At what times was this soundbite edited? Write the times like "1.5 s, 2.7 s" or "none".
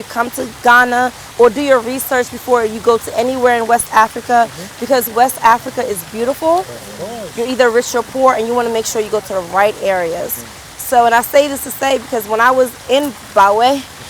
none